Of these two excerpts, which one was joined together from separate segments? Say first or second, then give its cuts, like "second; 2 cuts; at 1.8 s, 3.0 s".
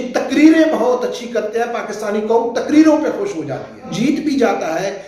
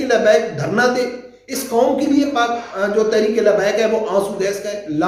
first; 1 cut; at 3.9 s